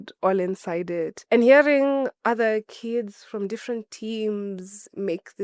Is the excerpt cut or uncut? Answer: cut